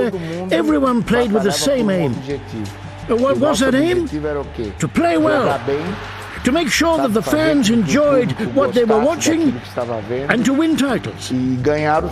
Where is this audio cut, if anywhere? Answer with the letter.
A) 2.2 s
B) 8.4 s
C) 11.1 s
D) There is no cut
C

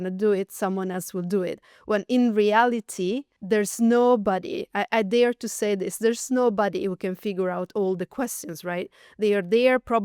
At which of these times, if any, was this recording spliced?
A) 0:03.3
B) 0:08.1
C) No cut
A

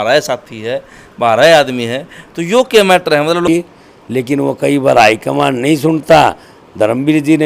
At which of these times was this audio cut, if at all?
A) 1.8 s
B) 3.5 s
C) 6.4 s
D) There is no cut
B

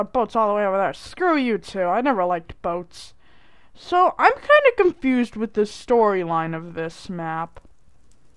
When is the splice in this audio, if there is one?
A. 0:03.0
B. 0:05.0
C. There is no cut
A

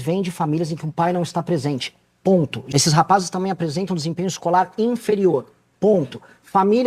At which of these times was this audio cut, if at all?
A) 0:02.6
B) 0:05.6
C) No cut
A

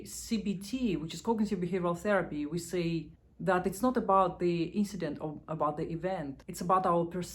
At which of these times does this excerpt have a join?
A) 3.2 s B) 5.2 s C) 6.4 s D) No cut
C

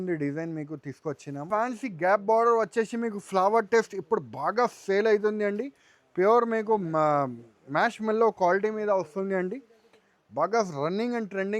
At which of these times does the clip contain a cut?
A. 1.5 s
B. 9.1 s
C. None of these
A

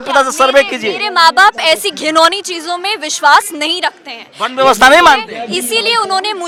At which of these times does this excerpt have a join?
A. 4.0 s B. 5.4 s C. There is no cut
C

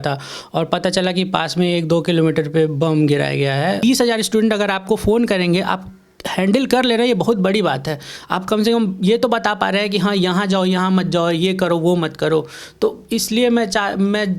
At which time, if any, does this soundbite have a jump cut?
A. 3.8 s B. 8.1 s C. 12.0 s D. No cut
A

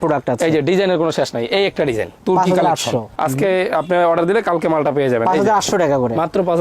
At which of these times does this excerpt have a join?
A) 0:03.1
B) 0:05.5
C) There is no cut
A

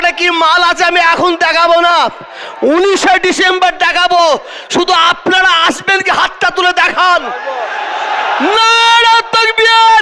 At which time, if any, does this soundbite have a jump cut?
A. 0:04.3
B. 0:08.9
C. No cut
C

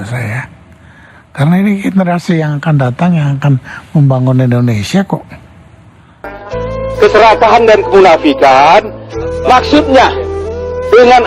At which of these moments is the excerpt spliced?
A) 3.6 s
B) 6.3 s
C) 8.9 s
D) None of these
B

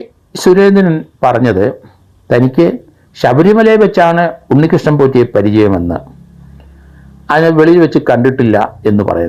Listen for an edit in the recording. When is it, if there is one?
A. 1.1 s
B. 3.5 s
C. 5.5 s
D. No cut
D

